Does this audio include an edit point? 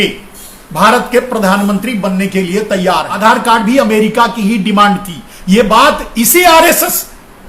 yes; 1 cut; at 3.2 s

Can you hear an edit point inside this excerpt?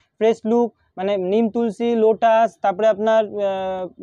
no; 0 cuts

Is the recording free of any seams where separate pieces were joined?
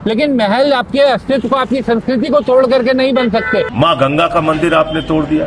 no; 1 cut; at 3.7 s

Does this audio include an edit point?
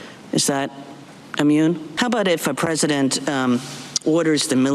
yes; 1 cut; at 1.9 s

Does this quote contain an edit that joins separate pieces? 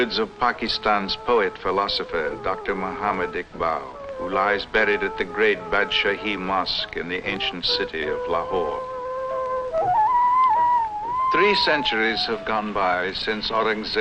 yes; 1 cut; at 10.1 s

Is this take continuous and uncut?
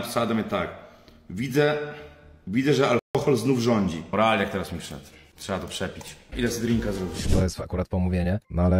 no; 2 cuts; at 4.0 s, 7.3 s

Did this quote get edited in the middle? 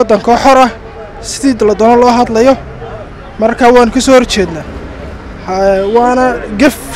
no; 0 cuts

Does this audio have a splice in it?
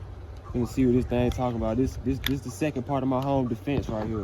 no; 0 cuts

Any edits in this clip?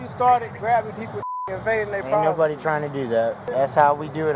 yes; 1 cut; at 3.4 s

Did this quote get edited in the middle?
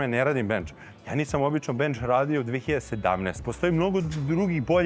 yes; 1 cut; at 3.4 s

